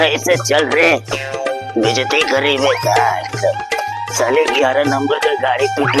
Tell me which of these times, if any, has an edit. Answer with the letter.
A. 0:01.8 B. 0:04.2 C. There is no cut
C